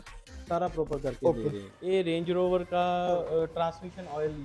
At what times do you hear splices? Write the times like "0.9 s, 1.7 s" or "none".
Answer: 1.4 s

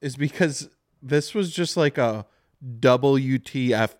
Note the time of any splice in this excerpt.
none

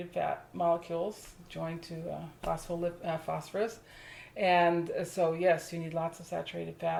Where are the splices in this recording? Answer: none

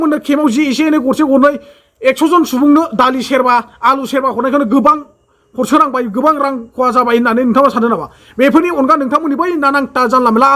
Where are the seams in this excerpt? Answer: none

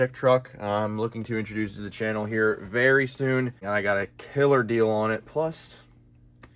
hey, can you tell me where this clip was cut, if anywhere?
3.6 s

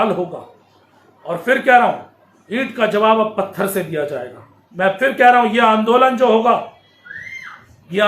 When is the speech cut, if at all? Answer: 4.6 s

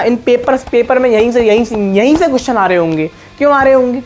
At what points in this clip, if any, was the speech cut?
none

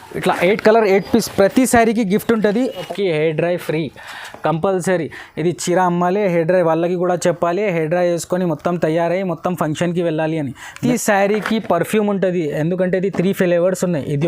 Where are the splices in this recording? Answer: 2.8 s, 10.8 s

